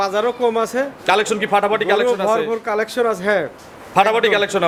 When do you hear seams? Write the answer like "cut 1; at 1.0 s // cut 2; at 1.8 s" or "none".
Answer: none